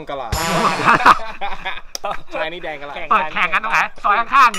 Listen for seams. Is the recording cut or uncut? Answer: cut